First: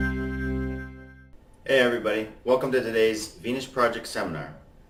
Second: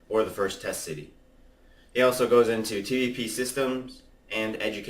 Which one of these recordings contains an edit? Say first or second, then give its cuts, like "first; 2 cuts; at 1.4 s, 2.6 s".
second; 1 cut; at 2.2 s